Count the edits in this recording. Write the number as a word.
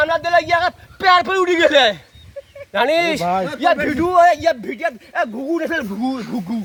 zero